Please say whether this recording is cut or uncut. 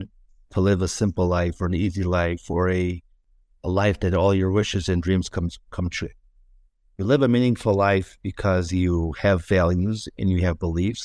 uncut